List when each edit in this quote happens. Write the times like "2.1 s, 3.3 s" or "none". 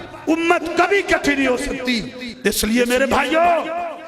none